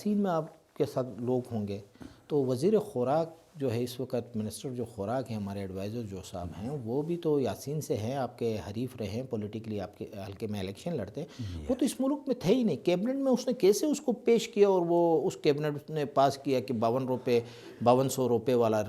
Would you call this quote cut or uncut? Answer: uncut